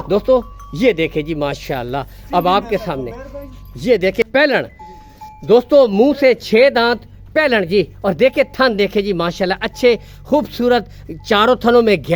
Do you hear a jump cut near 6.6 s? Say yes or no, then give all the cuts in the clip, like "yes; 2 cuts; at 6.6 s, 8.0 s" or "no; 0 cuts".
no; 1 cut; at 4.2 s